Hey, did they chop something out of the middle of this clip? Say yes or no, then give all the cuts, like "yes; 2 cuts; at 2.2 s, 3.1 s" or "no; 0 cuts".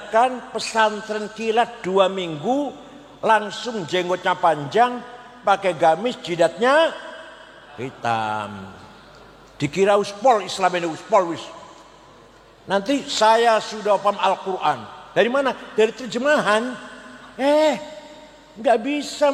no; 0 cuts